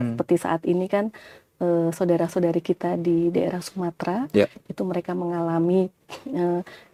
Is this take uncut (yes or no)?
yes